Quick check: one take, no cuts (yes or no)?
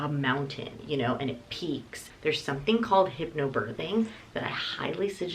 no